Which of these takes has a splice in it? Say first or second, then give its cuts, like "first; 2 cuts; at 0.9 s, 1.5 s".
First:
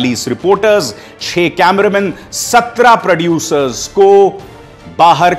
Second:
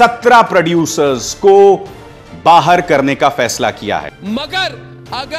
second; 1 cut; at 4.1 s